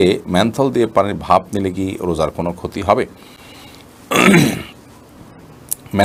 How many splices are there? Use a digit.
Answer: 0